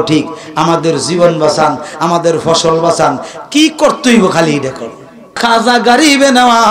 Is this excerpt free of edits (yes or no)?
no